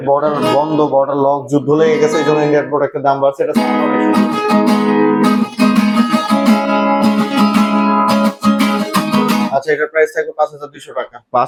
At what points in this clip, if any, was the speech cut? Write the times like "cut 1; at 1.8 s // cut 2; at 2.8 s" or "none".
none